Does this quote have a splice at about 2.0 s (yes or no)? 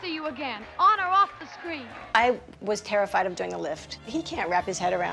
yes